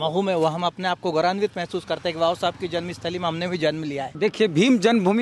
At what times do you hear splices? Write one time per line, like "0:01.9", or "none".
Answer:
0:04.1